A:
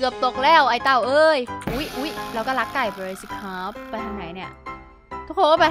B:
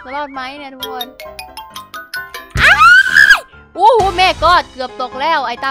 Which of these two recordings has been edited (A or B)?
A